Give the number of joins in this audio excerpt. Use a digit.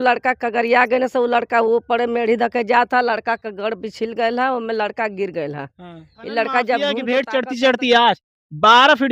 1